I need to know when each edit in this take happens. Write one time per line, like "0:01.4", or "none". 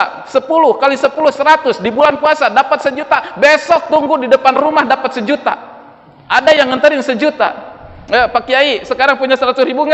none